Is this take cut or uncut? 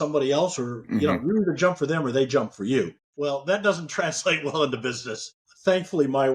uncut